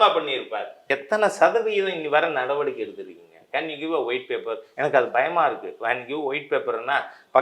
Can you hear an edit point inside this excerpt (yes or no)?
yes